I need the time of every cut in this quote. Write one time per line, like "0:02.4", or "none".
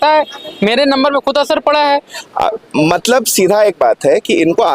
0:02.2